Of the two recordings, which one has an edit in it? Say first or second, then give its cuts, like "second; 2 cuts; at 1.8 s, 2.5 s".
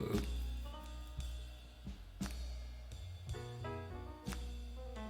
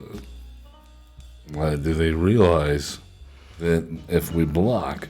second; 2 cuts; at 1.5 s, 3.6 s